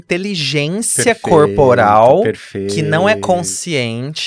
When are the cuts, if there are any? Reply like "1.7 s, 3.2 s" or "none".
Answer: none

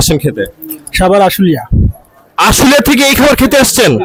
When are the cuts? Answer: none

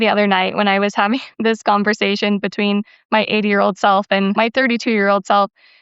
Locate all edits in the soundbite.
4.4 s

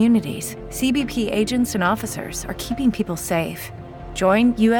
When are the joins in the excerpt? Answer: none

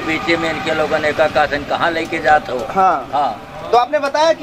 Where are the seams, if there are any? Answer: none

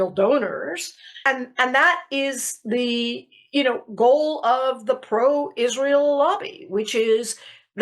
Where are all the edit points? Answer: 1.2 s

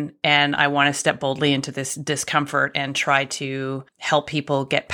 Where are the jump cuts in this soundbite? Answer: 3.9 s

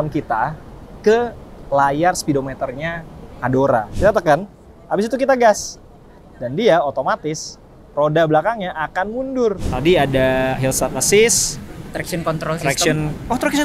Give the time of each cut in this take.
3.9 s, 9.7 s

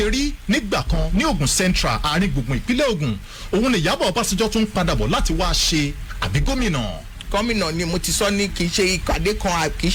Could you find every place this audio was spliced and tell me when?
none

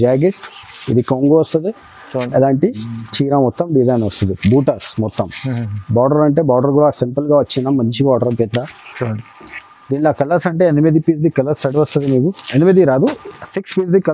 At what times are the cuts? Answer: none

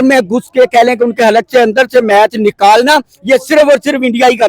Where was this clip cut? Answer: none

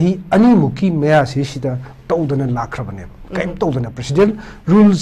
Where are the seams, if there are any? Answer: none

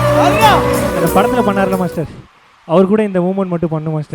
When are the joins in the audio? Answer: 1.0 s

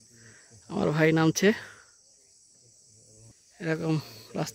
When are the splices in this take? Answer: none

